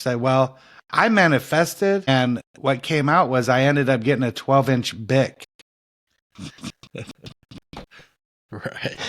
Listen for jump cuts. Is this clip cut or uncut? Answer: cut